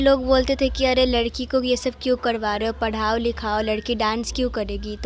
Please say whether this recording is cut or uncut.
uncut